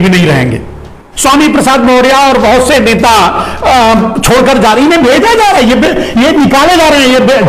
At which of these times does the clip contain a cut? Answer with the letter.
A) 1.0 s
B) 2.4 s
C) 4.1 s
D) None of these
A